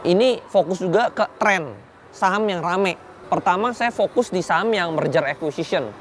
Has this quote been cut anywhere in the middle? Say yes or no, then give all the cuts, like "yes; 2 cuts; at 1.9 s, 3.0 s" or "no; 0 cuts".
yes; 1 cut; at 3.1 s